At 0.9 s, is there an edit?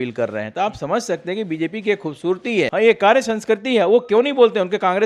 no; 1 cut; at 2.7 s

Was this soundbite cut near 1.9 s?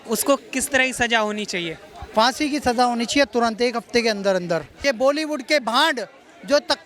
no; 1 cut; at 4.7 s

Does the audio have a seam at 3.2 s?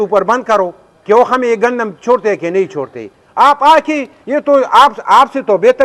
no; 0 cuts

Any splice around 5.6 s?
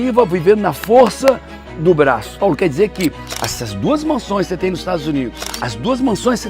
no; 1 cut; at 2.3 s

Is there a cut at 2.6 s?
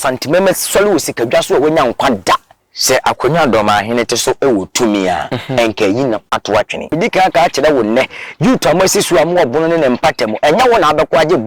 yes; 2 cuts; at 2.6 s, 6.9 s

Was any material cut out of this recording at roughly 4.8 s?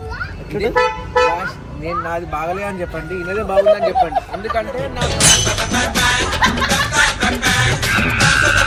no; 0 cuts

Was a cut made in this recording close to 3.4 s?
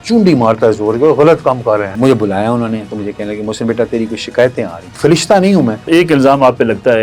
no; 3 cuts; at 2.0 s, 4.8 s, 5.8 s

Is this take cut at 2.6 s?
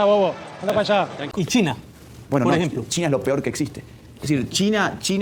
no; 1 cut; at 1.2 s

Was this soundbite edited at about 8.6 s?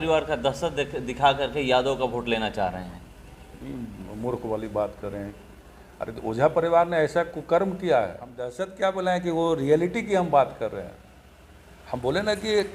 yes; 1 cut; at 8.6 s

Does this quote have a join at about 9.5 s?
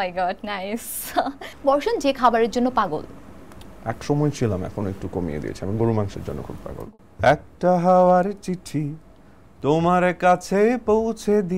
no; 2 cuts; at 1.4 s, 6.8 s

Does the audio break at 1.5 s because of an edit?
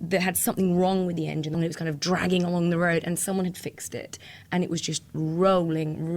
yes; 1 cut; at 1.5 s

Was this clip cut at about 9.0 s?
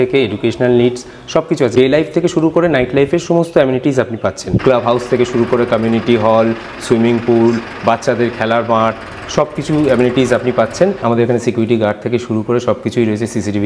no; 3 cuts; at 1.7 s, 4.5 s, 11.0 s

